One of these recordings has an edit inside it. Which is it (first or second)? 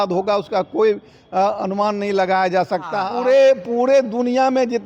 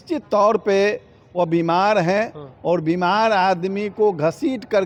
first